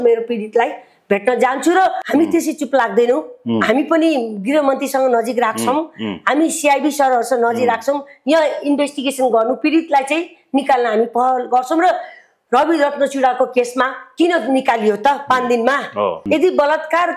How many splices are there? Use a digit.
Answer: 2